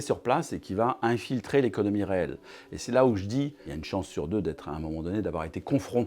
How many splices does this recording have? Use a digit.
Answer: 1